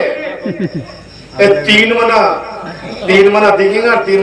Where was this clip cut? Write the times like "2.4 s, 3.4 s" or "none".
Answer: none

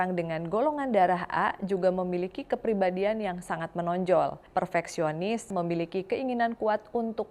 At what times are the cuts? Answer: 5.5 s

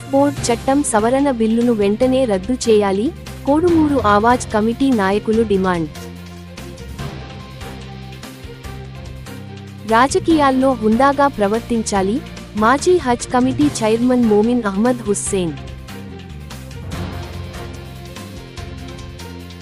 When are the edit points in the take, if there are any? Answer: none

